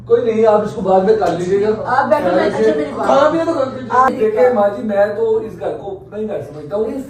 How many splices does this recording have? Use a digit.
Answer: 1